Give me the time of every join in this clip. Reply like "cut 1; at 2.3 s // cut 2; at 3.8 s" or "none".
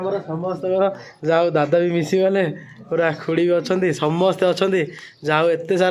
none